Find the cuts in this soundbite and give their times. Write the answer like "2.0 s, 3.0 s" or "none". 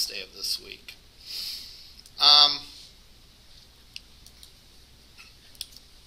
none